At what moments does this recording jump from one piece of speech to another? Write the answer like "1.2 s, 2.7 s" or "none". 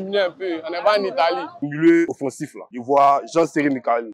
1.7 s